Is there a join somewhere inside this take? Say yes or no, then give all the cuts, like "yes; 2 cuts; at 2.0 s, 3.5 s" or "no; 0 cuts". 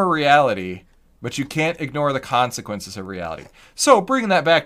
no; 0 cuts